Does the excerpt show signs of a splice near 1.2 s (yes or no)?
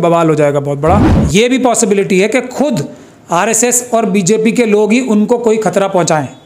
yes